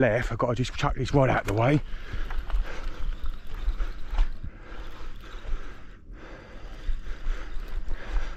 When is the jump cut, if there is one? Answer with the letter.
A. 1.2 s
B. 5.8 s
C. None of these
C